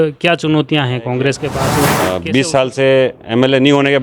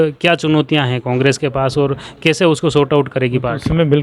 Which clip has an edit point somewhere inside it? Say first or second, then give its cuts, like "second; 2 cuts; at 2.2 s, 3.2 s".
first; 1 cut; at 2.0 s